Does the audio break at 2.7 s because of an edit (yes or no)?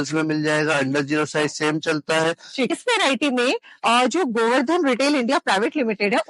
yes